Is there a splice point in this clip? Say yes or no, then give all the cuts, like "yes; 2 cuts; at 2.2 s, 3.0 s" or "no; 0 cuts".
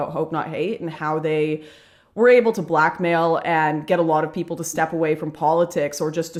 no; 0 cuts